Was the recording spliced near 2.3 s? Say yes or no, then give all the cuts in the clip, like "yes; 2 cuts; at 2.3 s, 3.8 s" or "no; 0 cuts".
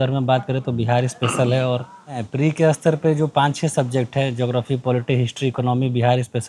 yes; 1 cut; at 2.3 s